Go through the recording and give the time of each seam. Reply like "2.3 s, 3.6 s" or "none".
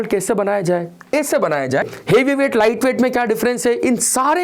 1.9 s